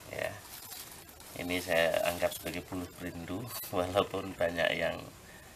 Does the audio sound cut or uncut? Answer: uncut